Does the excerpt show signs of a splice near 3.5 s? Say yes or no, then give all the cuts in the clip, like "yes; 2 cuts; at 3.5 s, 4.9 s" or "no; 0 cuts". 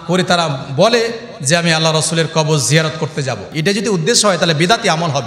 yes; 1 cut; at 3.5 s